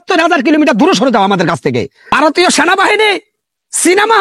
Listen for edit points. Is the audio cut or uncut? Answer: cut